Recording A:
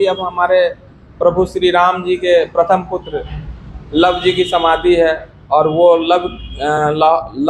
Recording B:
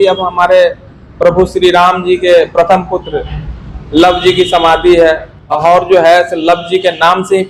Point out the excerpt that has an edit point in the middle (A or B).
B